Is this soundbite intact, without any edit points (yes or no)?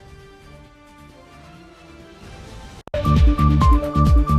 no